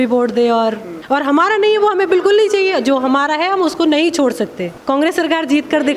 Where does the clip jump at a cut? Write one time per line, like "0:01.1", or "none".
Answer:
0:00.9
0:04.7